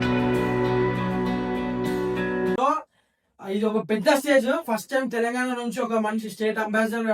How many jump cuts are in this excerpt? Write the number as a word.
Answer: zero